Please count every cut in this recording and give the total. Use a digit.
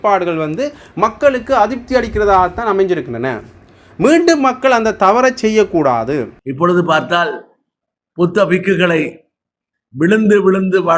1